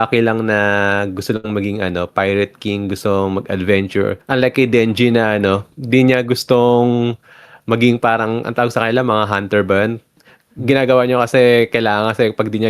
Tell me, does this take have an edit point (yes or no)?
yes